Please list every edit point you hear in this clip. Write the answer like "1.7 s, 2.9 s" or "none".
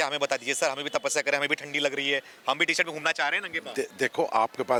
none

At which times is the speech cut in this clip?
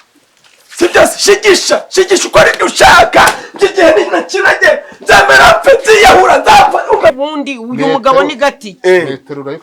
7.1 s

